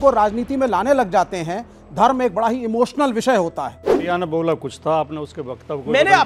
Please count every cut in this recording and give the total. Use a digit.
1